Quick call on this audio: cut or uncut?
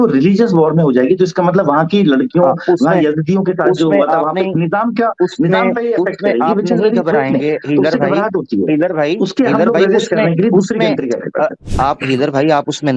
cut